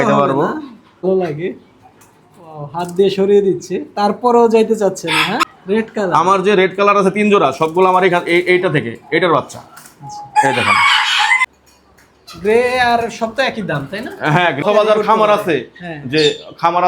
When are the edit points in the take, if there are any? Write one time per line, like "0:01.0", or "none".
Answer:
0:01.0
0:05.5
0:11.4
0:14.6